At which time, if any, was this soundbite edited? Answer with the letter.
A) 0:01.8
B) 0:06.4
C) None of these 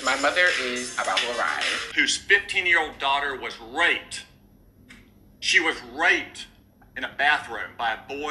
A